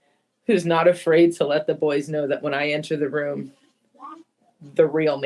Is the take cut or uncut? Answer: uncut